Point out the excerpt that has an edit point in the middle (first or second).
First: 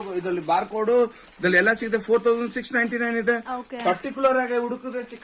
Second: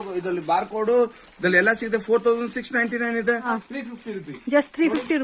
second